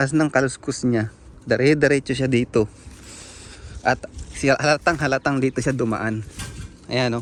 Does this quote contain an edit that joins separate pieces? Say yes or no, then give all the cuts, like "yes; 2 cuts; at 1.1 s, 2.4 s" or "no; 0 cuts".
no; 0 cuts